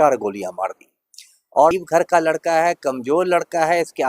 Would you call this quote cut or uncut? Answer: cut